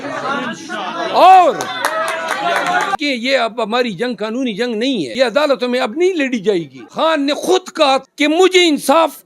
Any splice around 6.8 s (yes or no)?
yes